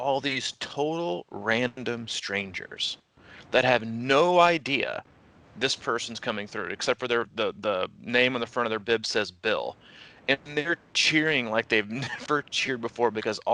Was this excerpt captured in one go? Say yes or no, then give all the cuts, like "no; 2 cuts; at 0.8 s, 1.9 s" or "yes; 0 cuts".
yes; 0 cuts